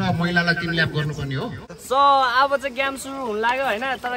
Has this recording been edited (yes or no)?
yes